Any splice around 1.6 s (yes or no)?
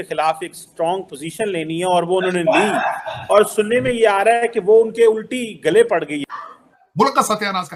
no